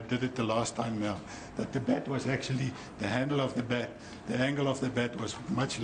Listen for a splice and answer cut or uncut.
cut